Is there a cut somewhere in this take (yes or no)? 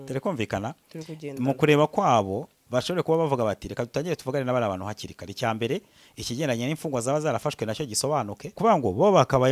yes